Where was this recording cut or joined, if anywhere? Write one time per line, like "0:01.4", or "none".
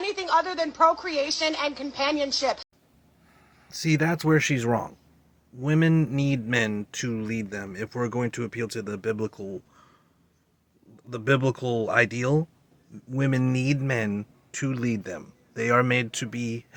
none